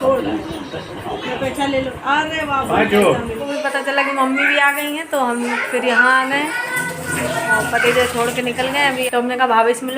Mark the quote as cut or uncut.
cut